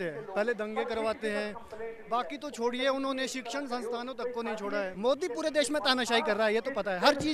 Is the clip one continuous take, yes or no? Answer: no